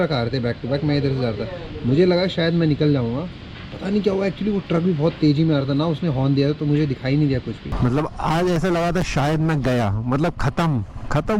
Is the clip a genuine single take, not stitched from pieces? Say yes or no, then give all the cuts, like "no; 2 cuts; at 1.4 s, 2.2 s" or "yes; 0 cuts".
no; 1 cut; at 7.6 s